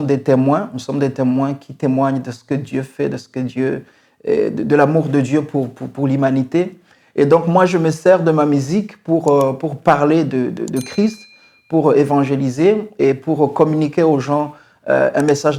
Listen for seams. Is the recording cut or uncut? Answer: uncut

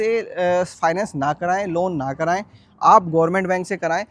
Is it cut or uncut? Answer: uncut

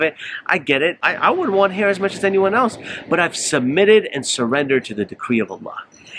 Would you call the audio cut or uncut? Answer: cut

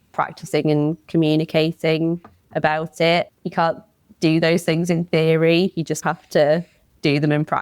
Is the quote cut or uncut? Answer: cut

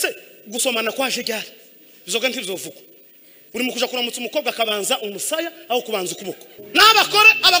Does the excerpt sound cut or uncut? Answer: cut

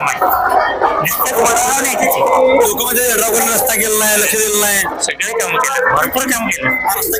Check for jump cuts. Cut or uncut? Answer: uncut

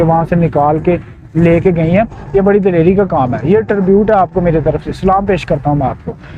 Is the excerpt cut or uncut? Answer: uncut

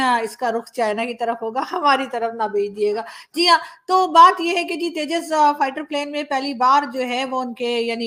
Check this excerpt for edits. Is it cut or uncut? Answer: uncut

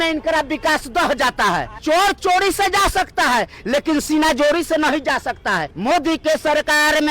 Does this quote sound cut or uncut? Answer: cut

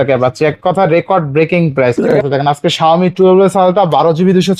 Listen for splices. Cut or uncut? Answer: cut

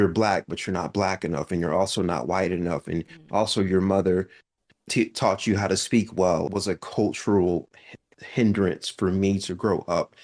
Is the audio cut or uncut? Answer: cut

